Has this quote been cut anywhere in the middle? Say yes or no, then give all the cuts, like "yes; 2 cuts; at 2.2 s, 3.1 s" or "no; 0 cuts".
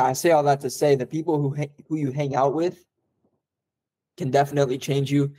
no; 0 cuts